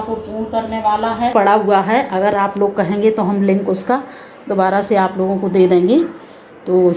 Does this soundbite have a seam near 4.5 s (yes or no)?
no